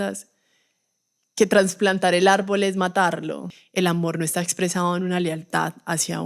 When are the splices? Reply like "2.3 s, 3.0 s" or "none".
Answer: 3.6 s

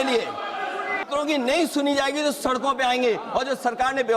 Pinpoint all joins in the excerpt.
1.0 s

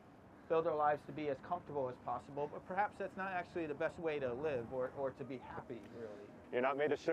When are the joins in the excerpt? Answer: none

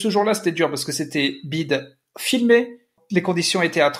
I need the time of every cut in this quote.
3.0 s

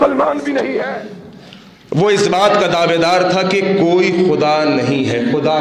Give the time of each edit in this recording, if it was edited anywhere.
1.1 s

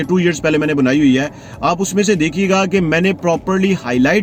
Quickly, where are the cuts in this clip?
none

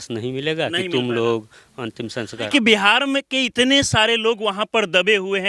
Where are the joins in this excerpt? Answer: 2.5 s

